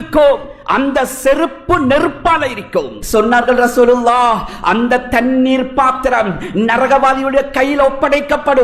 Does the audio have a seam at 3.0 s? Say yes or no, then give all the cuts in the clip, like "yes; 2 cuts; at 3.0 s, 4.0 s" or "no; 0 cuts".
yes; 1 cut; at 3.0 s